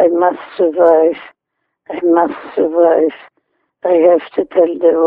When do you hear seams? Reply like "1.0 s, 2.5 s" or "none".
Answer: none